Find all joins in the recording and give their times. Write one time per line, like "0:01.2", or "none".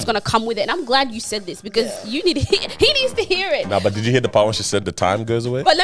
none